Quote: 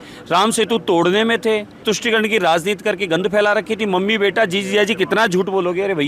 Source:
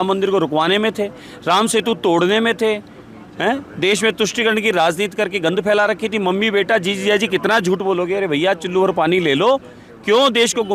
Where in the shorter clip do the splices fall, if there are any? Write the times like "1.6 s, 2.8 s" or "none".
1.8 s